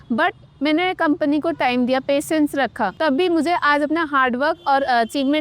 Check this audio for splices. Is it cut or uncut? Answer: cut